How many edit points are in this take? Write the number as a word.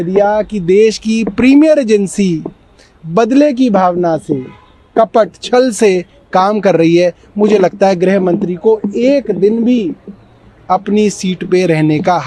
zero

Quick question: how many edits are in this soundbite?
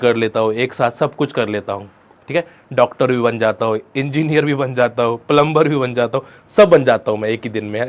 zero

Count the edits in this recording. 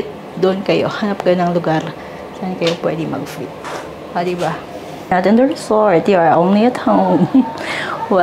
one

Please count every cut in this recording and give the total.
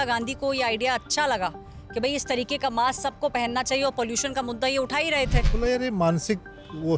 one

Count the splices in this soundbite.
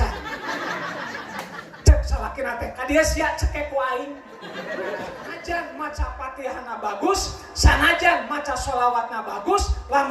one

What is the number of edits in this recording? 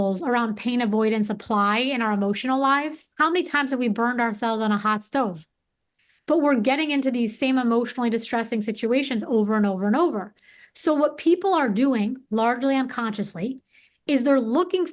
one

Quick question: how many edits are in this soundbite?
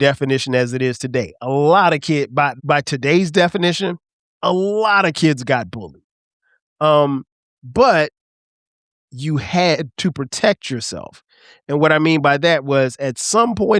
one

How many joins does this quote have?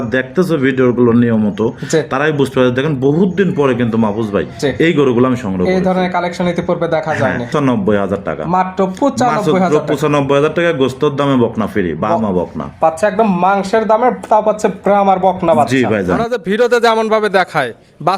two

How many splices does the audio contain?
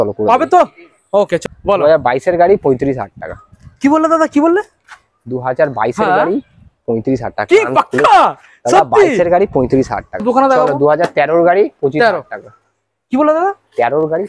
two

